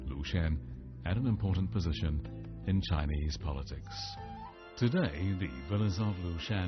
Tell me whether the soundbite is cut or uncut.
cut